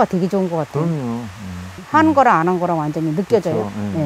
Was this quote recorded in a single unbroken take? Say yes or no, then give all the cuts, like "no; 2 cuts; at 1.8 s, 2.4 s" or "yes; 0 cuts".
no; 1 cut; at 1.8 s